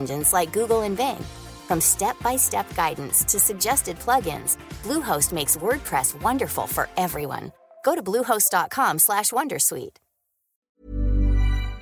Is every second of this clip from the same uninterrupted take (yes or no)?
no